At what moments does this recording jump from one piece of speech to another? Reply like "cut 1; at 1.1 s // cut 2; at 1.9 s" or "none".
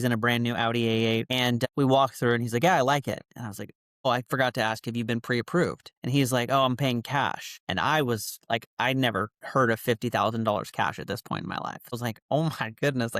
cut 1; at 11.9 s